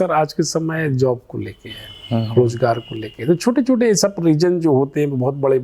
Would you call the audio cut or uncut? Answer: uncut